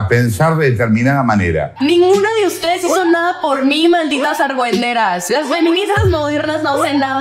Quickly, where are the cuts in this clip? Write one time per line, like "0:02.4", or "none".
0:01.7

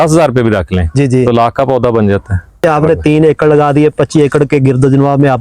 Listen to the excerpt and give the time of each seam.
0:02.6

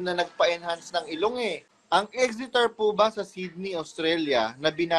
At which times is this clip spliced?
0:01.7

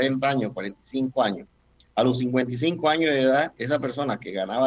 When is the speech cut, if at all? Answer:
none

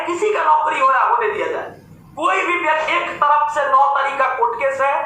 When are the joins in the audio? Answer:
0:02.9

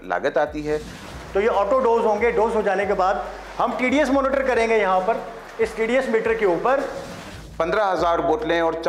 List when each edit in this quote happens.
0:01.0
0:07.2

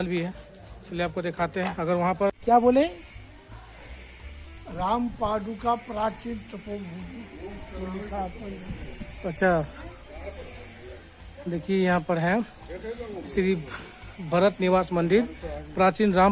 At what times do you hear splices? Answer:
0:02.3

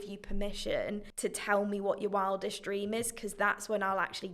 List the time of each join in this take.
0:01.1

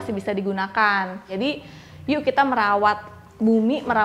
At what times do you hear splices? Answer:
0:01.2

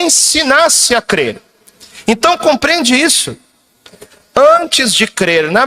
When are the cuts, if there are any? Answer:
0:04.0

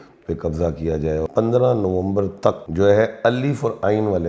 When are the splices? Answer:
0:01.3
0:02.7

